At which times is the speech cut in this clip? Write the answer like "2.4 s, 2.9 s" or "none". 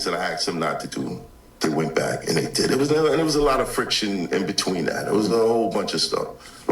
1.6 s